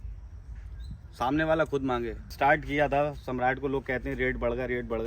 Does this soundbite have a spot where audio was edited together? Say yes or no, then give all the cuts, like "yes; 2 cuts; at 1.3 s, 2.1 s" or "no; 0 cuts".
yes; 1 cut; at 2.3 s